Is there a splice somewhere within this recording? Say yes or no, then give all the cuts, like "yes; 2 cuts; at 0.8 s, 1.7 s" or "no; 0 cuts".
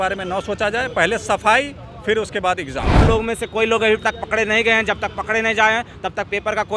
yes; 1 cut; at 3.0 s